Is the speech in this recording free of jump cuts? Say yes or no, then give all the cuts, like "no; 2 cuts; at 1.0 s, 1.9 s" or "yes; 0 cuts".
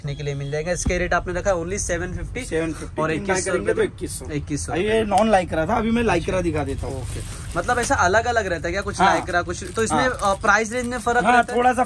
yes; 0 cuts